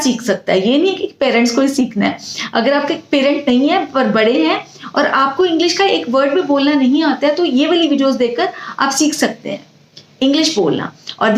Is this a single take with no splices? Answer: yes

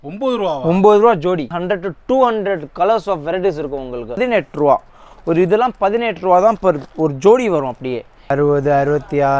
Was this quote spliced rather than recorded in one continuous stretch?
yes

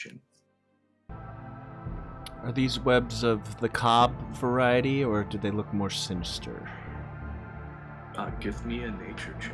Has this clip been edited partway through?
yes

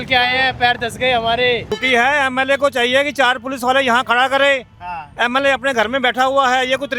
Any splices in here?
yes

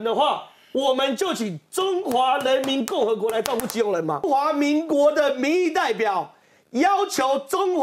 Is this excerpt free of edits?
no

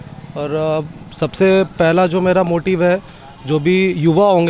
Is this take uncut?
yes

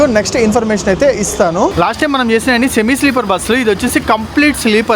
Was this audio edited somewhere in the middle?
yes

